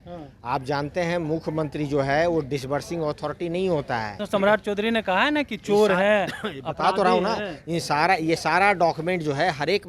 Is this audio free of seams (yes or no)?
no